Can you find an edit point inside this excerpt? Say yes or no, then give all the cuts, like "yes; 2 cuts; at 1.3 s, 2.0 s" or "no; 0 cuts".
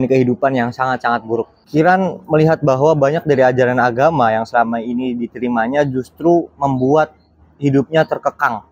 yes; 1 cut; at 1.6 s